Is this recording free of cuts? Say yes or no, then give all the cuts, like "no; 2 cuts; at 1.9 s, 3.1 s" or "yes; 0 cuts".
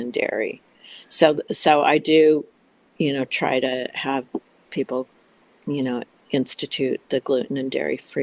yes; 0 cuts